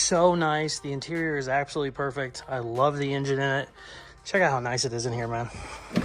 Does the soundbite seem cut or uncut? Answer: uncut